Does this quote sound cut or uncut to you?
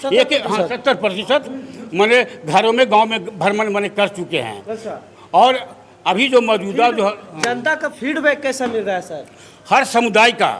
uncut